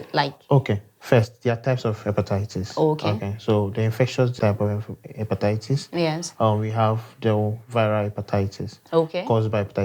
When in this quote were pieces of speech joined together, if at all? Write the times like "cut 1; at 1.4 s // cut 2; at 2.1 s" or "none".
cut 1; at 4.3 s